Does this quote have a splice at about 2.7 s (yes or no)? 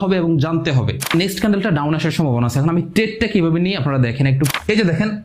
no